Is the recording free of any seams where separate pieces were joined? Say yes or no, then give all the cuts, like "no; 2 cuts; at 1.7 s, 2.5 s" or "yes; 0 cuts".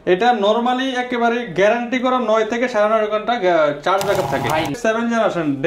no; 1 cut; at 4.8 s